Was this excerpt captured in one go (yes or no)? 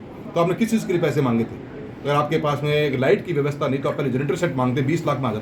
yes